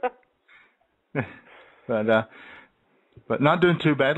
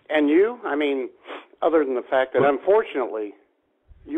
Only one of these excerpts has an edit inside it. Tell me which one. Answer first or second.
second